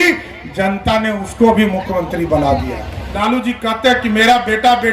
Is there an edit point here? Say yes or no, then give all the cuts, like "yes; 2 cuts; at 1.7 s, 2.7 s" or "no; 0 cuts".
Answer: yes; 1 cut; at 3.0 s